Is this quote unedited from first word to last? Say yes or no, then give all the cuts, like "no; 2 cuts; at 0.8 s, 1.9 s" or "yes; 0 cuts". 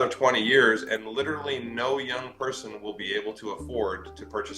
no; 1 cut; at 1.1 s